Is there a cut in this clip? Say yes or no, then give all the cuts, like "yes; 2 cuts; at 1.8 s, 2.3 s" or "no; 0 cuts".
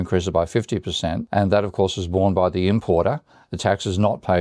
yes; 1 cut; at 1.2 s